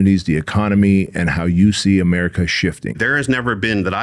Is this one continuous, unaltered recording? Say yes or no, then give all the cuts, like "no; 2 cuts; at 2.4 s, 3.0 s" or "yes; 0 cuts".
no; 1 cut; at 3.0 s